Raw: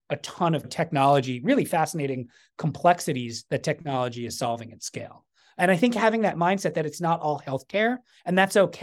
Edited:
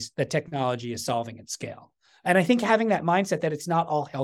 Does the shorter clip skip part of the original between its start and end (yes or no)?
no